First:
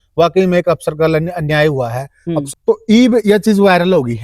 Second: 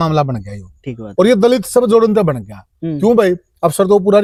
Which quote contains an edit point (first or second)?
first